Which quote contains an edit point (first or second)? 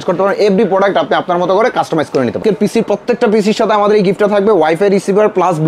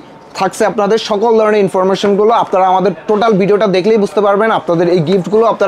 first